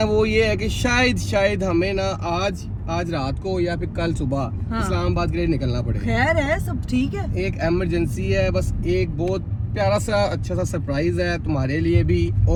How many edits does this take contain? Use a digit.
0